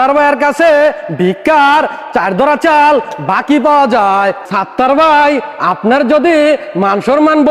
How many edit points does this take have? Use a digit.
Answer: 1